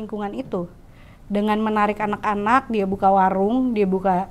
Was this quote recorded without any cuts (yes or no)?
yes